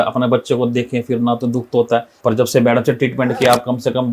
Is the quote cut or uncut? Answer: cut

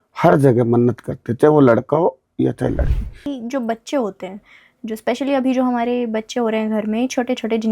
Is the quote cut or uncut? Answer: cut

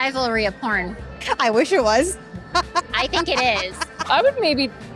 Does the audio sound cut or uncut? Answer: cut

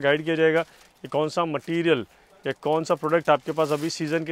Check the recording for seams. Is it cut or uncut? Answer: uncut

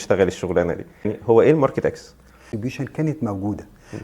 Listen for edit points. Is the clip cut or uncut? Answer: cut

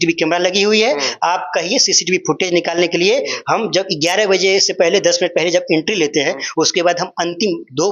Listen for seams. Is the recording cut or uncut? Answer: uncut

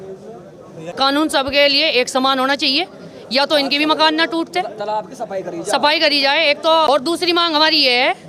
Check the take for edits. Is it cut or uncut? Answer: cut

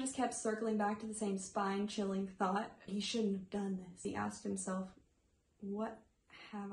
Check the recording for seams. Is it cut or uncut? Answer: cut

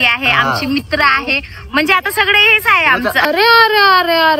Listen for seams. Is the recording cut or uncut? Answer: cut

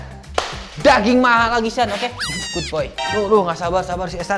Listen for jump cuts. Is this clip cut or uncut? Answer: cut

